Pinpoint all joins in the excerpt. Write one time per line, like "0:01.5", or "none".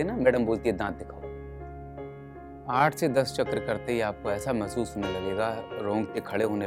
0:01.0
0:02.6